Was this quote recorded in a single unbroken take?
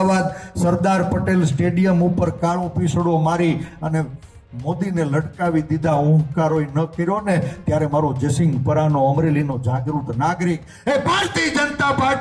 yes; 0 cuts

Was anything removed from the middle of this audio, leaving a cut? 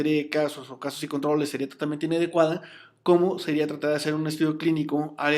yes; 1 cut; at 4.3 s

